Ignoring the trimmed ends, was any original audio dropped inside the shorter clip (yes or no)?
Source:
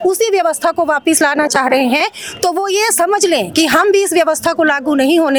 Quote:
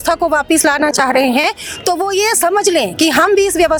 no